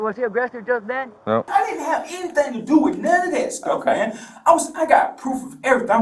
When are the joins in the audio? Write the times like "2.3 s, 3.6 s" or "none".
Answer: 1.5 s